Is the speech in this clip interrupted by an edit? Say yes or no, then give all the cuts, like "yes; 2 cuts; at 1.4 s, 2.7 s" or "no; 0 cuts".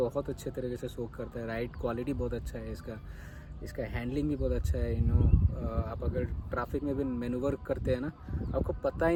no; 0 cuts